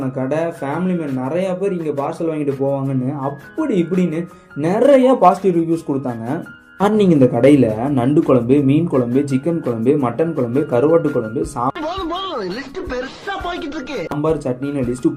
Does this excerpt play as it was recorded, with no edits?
yes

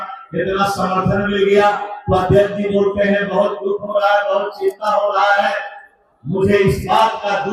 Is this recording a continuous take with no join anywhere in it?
yes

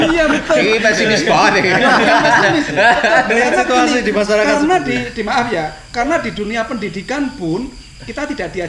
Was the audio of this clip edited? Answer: no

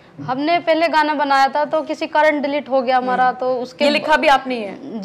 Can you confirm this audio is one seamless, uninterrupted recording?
yes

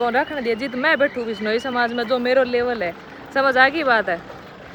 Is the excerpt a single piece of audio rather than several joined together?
yes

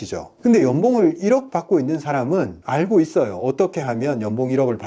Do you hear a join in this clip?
no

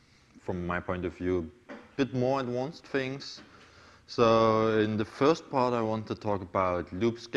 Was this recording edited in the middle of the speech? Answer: no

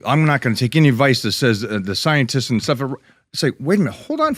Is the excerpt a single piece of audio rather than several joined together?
yes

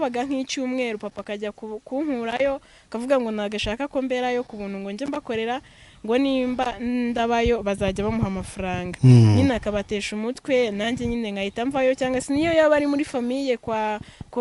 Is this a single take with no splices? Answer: yes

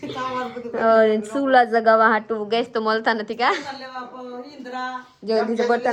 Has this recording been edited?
no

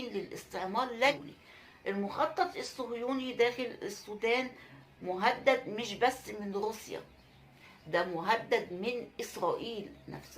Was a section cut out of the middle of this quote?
yes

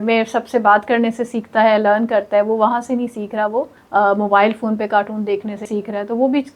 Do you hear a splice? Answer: yes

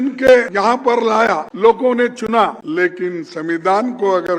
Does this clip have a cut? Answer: yes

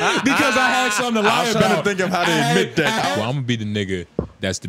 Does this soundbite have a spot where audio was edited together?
yes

